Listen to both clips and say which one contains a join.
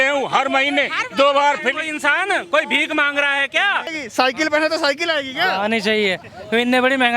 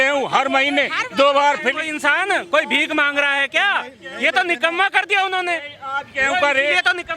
first; 1 cut; at 4.0 s

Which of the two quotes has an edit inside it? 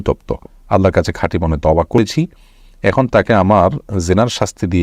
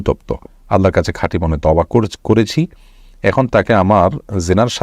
first; 1 cut; at 2.0 s

